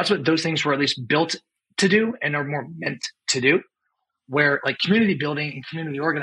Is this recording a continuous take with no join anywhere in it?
yes; 0 cuts

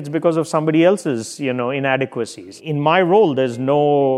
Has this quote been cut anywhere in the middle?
yes; 1 cut; at 2.5 s

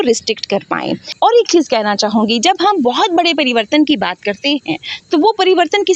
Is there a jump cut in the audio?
yes; 1 cut; at 1.0 s

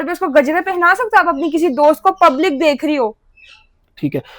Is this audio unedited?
yes; 0 cuts

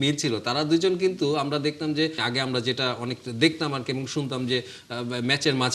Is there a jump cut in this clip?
yes; 1 cut; at 2.2 s

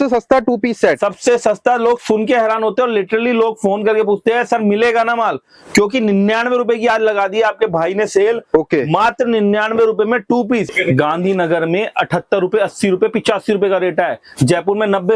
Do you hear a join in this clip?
yes; 1 cut; at 10.7 s

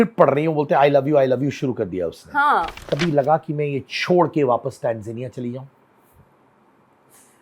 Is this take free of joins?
no; 1 cut; at 2.8 s

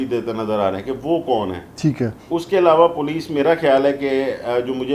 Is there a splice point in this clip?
no; 0 cuts

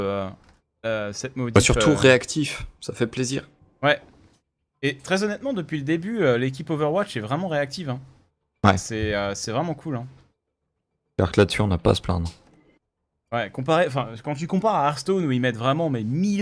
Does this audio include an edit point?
yes; 1 cut; at 14.7 s

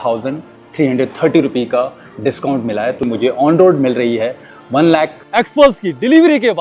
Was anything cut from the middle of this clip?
yes; 2 cuts; at 3.0 s, 5.2 s

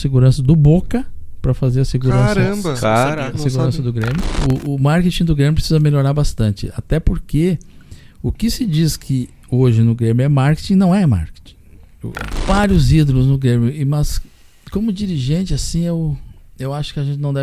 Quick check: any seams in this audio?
yes; 2 cuts; at 4.4 s, 12.4 s

